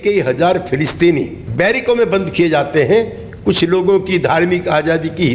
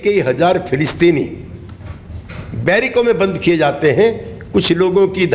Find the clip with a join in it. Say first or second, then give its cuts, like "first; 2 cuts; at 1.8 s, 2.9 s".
first; 1 cut; at 1.4 s